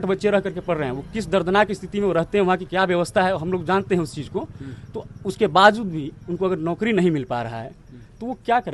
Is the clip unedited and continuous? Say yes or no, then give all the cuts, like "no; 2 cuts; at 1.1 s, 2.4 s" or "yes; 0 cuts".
yes; 0 cuts